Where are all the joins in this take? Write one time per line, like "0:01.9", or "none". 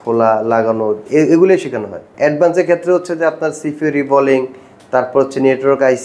0:02.0